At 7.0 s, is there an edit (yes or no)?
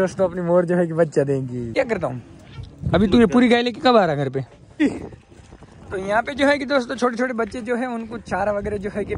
no